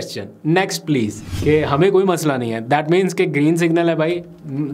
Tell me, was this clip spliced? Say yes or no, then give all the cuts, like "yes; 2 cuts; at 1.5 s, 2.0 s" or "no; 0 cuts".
yes; 1 cut; at 1.2 s